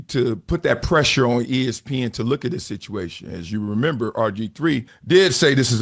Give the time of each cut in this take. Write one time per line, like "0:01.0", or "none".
0:04.9